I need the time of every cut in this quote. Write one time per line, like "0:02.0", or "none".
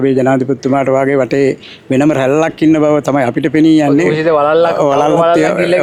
none

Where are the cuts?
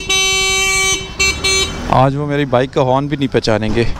0:01.1

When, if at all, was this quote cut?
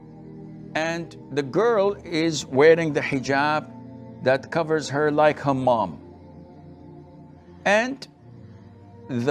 0:00.7
0:06.0
0:07.3

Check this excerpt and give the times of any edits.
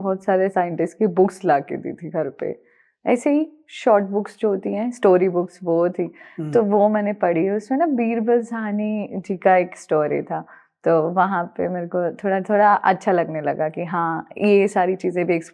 none

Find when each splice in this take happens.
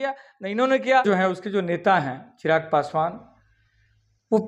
0:01.0

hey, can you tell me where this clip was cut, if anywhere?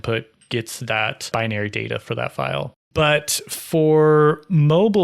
0:01.3
0:02.8

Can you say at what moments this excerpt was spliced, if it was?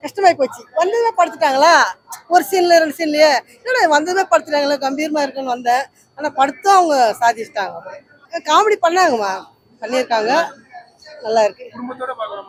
none

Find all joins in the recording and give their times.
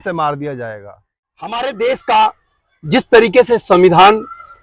0:01.5

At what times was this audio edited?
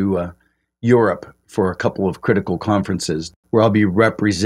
0:03.2

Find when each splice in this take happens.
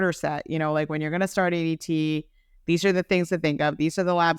none

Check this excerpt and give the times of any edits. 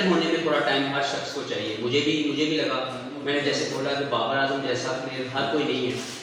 none

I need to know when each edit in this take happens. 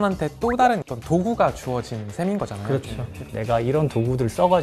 0:03.2

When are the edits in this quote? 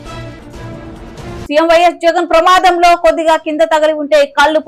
0:01.4

